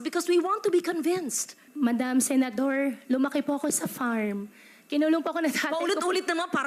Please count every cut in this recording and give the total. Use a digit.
1